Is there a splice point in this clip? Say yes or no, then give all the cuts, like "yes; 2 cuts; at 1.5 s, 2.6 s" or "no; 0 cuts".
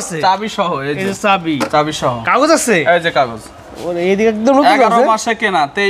no; 0 cuts